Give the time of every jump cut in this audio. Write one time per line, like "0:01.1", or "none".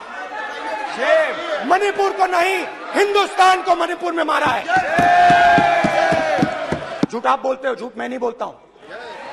0:07.1